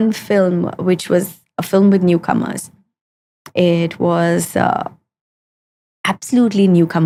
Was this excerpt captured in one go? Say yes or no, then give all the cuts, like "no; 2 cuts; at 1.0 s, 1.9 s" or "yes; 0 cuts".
yes; 0 cuts